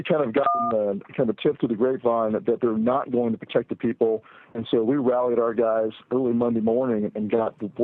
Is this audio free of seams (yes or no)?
no